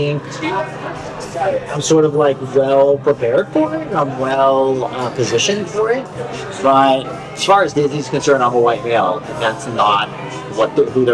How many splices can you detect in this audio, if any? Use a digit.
1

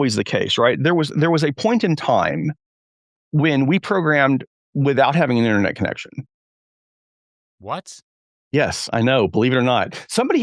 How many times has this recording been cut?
0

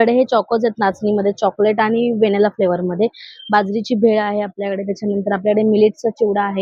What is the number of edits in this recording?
0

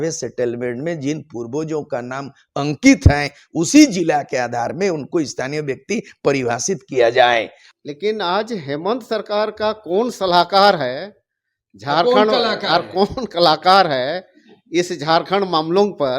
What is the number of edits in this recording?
1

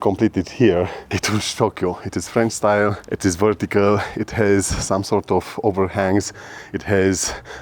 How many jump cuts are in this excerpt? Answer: 1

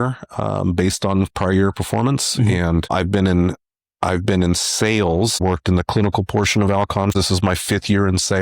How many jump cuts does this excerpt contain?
3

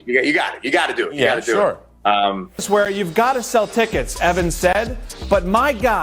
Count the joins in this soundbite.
1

